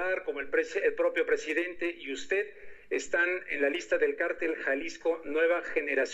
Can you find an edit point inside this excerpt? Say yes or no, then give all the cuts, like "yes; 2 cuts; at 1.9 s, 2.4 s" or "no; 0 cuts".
no; 0 cuts